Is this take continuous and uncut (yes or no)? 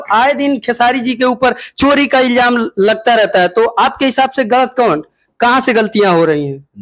yes